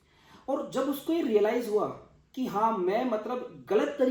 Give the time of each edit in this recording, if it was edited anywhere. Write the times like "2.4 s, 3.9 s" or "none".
none